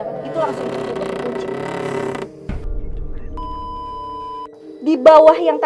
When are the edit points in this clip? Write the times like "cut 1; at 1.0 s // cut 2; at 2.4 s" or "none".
cut 1; at 2.4 s // cut 2; at 4.5 s